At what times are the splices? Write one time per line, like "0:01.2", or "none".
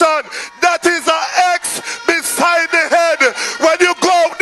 none